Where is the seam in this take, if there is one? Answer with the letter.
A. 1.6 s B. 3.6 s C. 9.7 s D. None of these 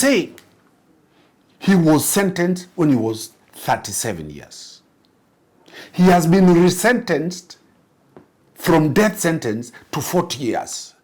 D